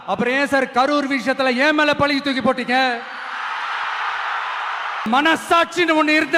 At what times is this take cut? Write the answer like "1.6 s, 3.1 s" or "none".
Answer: 5.1 s